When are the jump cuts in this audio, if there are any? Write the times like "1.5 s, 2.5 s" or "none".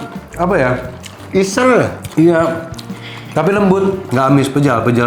4.1 s